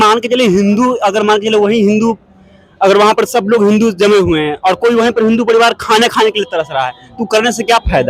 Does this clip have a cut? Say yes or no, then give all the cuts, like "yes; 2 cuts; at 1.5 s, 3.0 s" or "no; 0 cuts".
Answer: no; 0 cuts